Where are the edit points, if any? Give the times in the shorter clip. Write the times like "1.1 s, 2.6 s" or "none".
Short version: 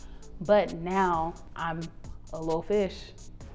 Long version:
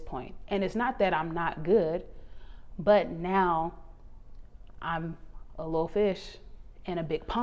1.5 s